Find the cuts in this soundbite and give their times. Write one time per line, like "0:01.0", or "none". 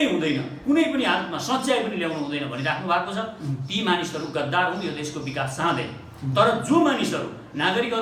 none